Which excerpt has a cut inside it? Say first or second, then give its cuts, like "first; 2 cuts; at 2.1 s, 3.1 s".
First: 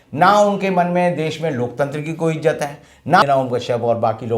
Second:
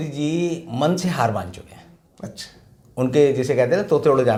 first; 1 cut; at 3.2 s